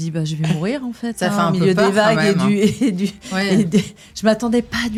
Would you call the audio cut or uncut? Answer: uncut